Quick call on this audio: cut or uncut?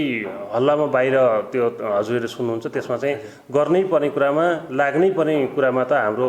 uncut